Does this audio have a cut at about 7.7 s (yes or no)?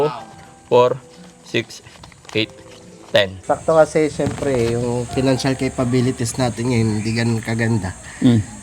no